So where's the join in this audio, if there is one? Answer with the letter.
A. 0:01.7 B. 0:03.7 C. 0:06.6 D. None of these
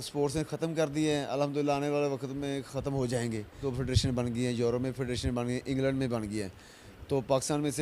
B